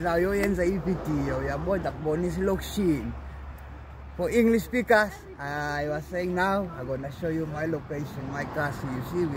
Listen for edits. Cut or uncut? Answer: uncut